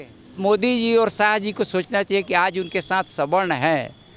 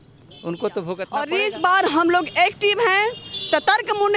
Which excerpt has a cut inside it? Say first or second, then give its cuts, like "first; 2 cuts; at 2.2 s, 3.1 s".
second; 1 cut; at 1.1 s